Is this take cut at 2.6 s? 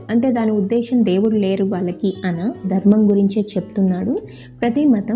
yes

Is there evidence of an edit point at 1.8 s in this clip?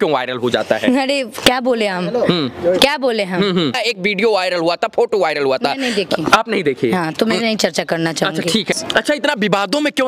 no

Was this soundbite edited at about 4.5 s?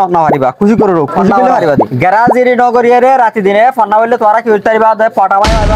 no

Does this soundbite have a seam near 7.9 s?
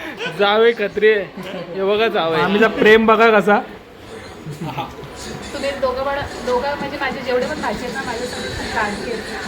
no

